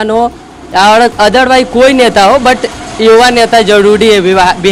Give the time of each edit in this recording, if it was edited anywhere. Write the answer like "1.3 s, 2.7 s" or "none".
none